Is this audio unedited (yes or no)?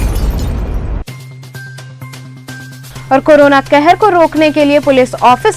no